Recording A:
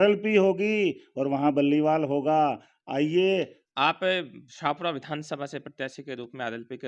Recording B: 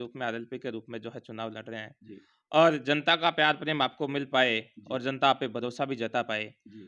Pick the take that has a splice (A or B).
A